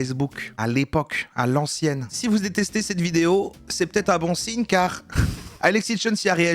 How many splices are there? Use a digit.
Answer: 1